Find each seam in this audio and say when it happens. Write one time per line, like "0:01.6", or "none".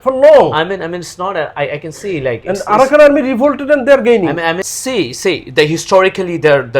0:04.7